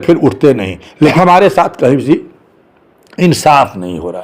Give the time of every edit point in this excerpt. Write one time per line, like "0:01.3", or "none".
0:01.1